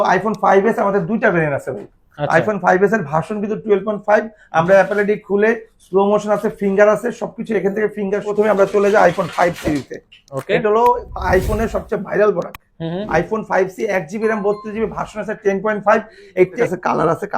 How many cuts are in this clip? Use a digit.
2